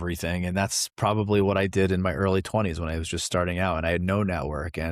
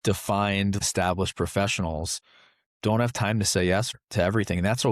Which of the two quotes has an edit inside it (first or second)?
second